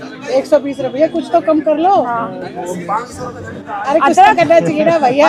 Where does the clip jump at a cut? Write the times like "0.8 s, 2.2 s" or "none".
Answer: none